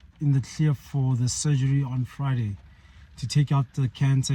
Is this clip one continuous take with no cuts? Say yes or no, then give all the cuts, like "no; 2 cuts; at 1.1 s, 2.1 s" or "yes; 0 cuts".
yes; 0 cuts